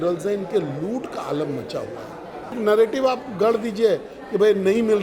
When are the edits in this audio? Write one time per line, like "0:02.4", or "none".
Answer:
0:02.5